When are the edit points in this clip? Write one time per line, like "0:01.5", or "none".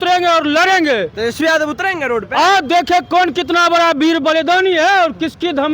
none